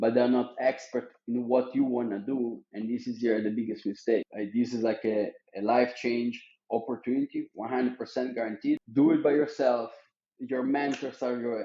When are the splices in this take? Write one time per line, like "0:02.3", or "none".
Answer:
0:04.3
0:08.8